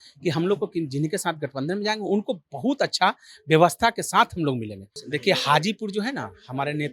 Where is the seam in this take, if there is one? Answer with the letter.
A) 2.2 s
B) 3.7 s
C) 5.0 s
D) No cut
C